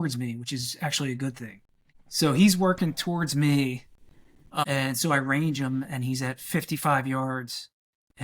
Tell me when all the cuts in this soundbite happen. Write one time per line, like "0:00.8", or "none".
0:01.8
0:04.6